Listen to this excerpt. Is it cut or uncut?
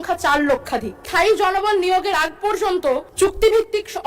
cut